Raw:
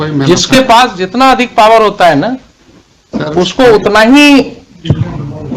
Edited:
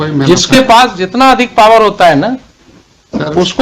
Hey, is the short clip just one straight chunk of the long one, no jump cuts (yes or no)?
yes